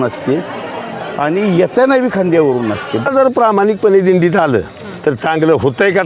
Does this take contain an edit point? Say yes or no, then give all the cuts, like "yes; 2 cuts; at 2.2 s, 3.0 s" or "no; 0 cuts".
yes; 1 cut; at 3.1 s